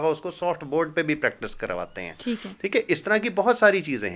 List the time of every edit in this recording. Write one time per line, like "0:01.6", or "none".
none